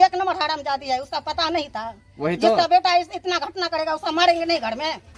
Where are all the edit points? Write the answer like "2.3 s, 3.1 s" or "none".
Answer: none

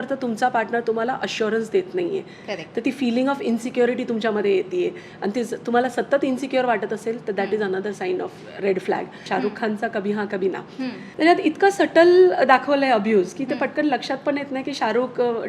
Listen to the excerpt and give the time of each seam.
8.4 s, 9.2 s, 11.0 s

